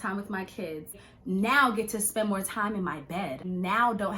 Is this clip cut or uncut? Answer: cut